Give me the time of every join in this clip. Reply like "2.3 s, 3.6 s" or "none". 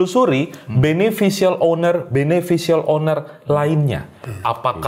none

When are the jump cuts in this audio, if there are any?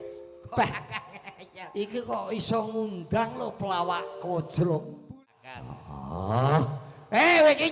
5.2 s

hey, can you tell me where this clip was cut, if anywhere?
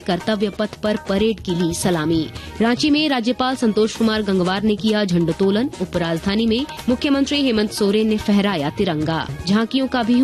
2.4 s, 6.7 s, 9.3 s

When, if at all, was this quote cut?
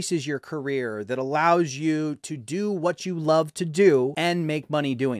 4.1 s

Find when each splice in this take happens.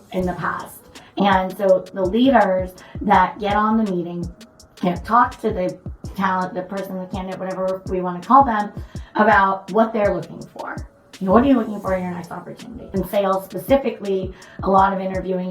12.8 s

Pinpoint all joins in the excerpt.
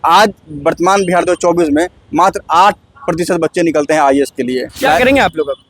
4.7 s

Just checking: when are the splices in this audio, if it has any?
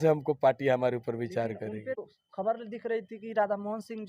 2.0 s

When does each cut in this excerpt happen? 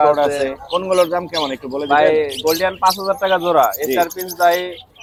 none

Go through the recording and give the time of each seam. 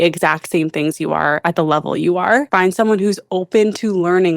2.5 s

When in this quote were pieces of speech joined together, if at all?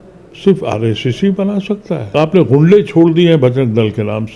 2.0 s

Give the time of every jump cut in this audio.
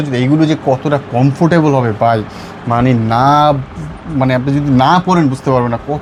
none

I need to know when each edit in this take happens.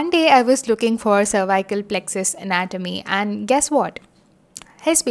none

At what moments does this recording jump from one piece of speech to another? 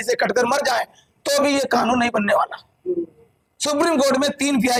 none

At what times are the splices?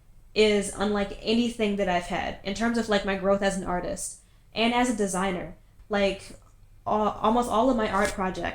5.7 s

